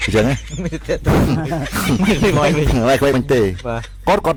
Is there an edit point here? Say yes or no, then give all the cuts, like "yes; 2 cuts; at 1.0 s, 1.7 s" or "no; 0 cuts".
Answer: no; 0 cuts